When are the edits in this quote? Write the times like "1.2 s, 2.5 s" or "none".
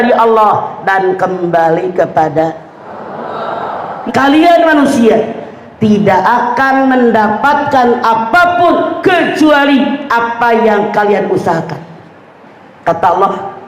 4.0 s